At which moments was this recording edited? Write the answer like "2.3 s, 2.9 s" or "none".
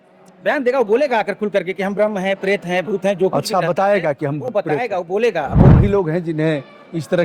5.7 s